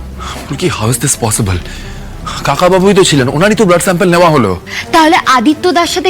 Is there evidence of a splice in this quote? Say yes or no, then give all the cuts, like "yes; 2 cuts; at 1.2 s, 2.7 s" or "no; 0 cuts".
yes; 1 cut; at 4.7 s